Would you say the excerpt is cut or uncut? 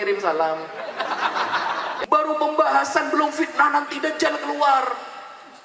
cut